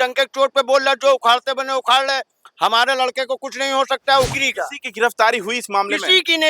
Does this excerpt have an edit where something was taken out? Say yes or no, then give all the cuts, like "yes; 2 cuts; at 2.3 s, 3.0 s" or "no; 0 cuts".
yes; 1 cut; at 4.3 s